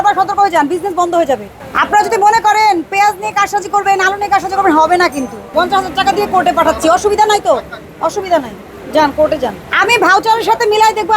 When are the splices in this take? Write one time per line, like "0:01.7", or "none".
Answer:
0:01.6
0:05.5
0:09.6